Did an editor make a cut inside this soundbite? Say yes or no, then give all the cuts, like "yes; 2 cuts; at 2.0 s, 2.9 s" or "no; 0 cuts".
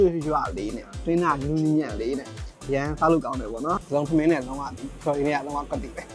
yes; 1 cut; at 3.8 s